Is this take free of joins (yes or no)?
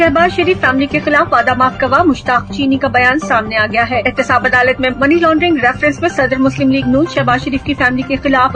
yes